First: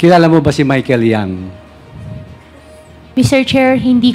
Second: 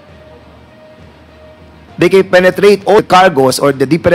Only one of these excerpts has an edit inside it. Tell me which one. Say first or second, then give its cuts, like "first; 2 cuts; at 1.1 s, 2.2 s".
second; 1 cut; at 3.0 s